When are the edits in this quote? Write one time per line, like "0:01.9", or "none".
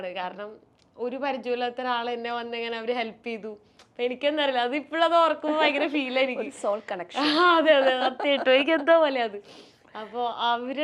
none